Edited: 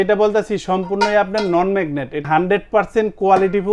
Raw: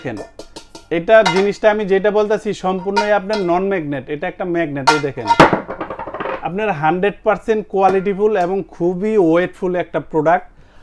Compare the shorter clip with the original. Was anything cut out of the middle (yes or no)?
yes